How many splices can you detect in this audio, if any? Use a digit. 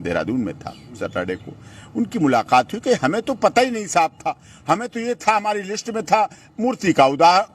1